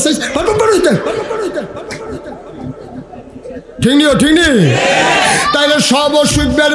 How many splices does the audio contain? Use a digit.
0